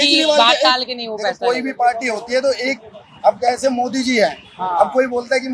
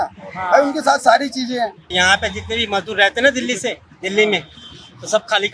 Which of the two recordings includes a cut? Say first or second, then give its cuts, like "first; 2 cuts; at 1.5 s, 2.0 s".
second; 1 cut; at 1.8 s